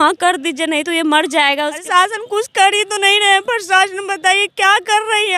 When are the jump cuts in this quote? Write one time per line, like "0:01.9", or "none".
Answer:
0:01.9